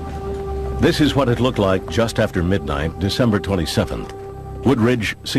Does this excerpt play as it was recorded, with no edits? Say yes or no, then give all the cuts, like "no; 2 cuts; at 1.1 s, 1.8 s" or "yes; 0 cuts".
yes; 0 cuts